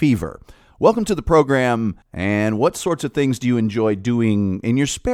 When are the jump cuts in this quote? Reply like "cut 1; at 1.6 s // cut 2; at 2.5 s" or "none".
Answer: cut 1; at 2.1 s